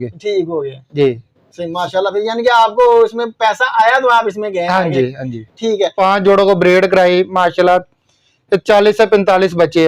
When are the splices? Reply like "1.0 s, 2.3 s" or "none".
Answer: 5.9 s